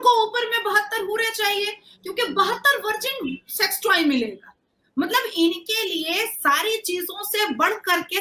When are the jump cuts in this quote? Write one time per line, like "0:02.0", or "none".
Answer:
none